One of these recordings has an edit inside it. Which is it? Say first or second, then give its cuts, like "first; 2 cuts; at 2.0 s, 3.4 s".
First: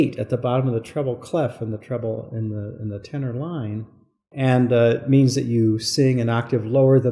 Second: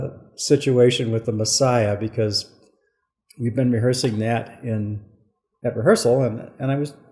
first; 1 cut; at 4.2 s